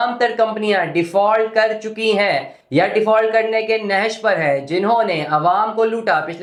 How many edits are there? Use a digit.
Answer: 0